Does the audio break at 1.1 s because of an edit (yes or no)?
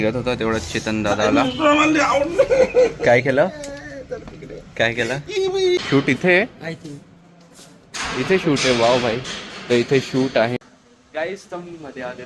no